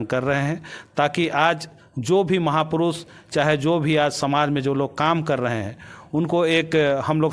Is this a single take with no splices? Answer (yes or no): yes